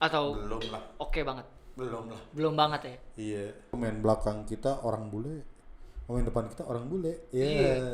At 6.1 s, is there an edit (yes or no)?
no